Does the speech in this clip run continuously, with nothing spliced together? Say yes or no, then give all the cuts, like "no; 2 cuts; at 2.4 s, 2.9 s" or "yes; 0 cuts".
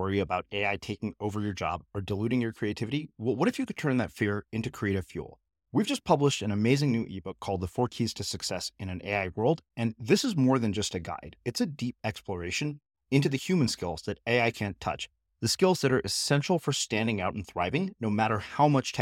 yes; 0 cuts